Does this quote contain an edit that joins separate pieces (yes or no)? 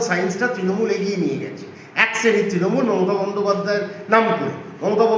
no